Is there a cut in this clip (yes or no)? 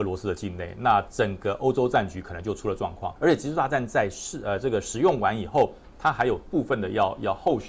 yes